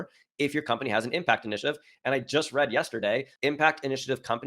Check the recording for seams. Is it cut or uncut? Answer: cut